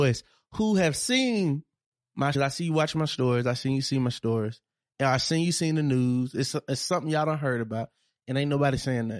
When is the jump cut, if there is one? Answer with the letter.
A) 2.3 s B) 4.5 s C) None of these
A